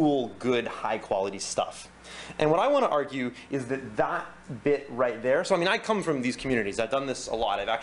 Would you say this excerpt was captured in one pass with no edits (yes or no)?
yes